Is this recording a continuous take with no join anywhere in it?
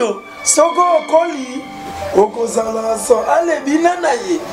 yes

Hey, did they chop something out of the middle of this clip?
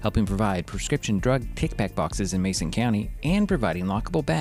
no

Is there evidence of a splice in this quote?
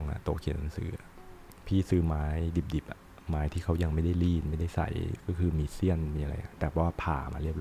no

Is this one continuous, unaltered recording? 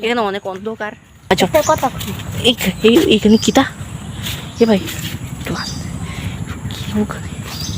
no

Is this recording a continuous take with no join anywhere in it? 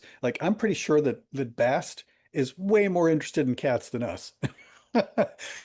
yes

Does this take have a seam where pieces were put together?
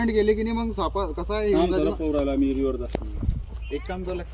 no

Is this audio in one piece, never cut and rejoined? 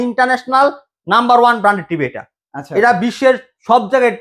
yes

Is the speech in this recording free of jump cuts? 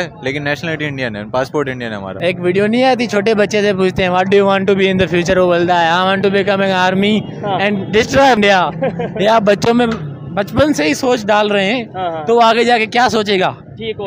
no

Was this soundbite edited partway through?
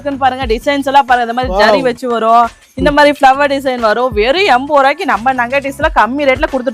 no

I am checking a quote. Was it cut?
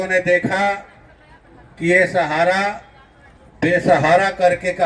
no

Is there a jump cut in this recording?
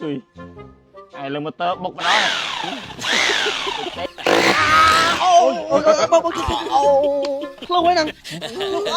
yes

